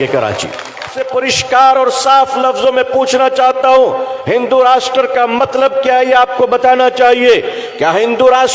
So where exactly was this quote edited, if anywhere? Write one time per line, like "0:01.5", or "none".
0:01.0